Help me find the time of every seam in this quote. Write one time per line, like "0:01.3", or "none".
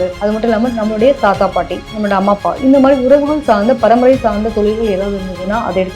none